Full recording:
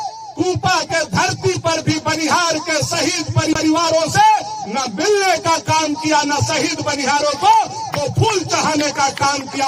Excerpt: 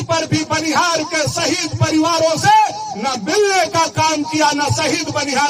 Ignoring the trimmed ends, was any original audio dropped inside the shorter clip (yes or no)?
yes